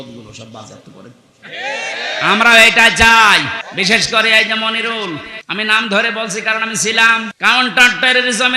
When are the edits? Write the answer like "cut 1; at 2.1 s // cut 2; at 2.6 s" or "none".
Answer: cut 1; at 3.6 s // cut 2; at 5.4 s // cut 3; at 7.3 s